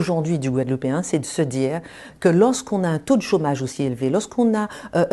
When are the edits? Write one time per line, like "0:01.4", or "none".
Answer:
none